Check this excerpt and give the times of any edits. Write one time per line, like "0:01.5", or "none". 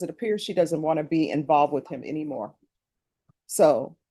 none